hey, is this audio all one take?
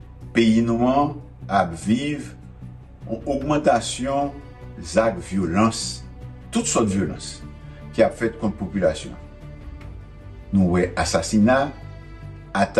no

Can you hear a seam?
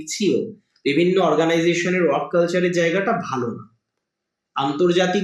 no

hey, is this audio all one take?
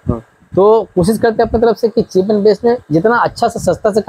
yes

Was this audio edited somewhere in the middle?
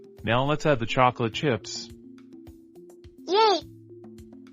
yes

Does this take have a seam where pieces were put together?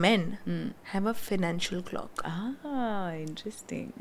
no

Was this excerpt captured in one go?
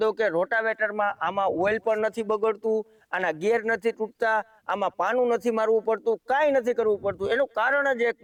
yes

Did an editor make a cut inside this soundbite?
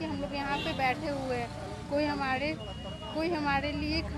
no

